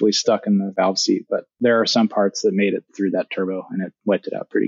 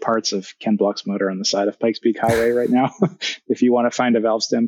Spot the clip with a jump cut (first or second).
first